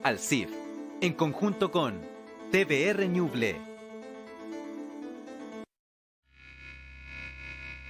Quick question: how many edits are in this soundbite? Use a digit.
1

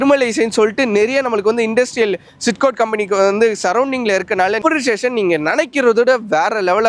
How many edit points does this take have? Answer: 1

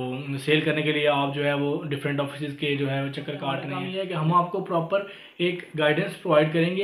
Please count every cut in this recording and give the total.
1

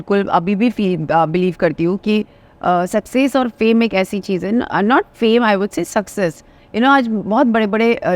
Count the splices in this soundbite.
0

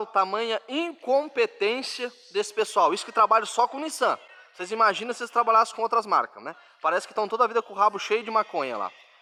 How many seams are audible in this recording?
0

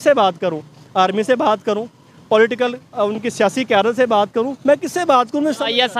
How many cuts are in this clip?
0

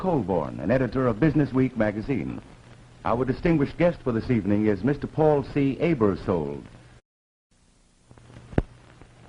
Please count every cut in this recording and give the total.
0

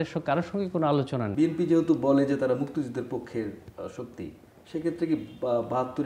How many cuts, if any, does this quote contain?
1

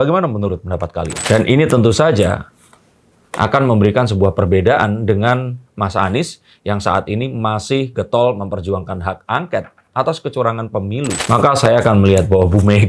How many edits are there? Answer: 2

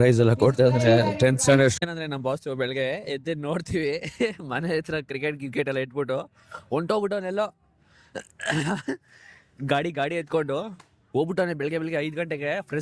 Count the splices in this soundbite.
1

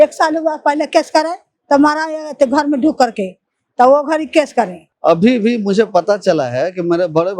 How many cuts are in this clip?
1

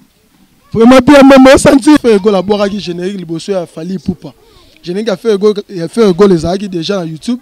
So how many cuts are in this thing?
1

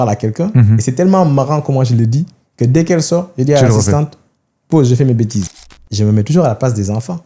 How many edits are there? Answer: 1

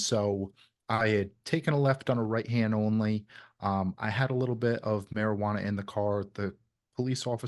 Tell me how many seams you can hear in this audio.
0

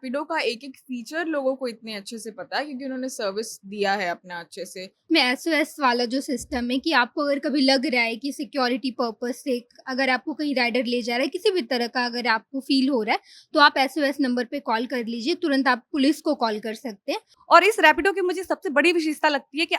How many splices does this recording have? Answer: 2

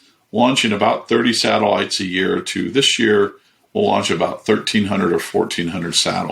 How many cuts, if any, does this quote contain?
0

